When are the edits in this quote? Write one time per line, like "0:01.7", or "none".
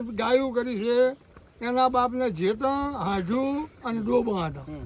none